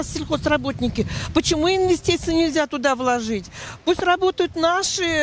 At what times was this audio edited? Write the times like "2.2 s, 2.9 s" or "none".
none